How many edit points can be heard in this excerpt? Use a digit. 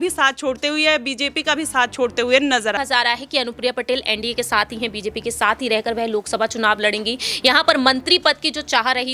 1